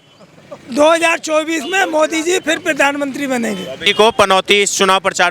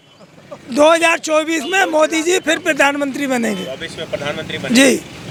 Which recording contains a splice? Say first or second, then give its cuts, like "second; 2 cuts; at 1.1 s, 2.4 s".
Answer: first; 1 cut; at 3.8 s